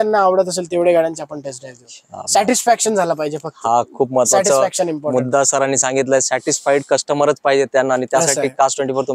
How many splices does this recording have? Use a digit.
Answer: 0